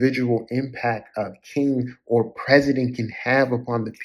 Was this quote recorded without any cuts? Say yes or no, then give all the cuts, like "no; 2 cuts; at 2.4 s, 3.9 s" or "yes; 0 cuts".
yes; 0 cuts